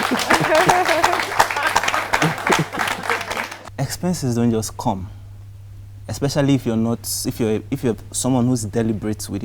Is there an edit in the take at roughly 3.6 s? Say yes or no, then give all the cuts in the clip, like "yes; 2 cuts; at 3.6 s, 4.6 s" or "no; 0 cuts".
yes; 1 cut; at 3.6 s